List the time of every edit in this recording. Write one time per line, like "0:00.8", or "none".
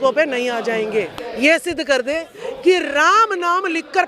0:01.1